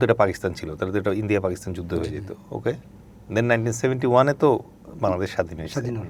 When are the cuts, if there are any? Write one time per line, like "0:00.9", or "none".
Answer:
none

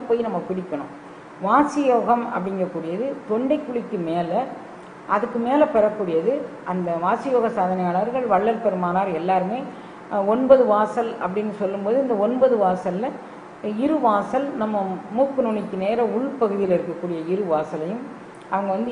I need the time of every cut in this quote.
none

